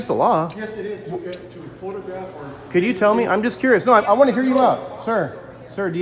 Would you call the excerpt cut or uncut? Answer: uncut